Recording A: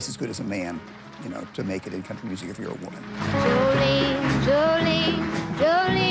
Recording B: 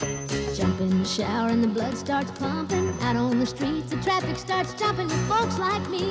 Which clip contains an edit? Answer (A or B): A